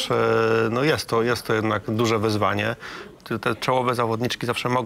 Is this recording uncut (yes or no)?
no